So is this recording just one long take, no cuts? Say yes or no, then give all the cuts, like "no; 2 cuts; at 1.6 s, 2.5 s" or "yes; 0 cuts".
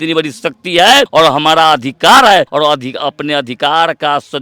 no; 2 cuts; at 1.1 s, 2.5 s